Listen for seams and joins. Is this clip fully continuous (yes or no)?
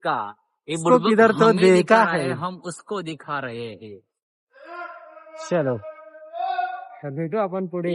yes